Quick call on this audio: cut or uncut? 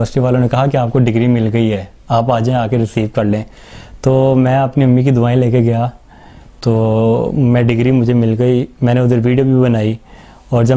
uncut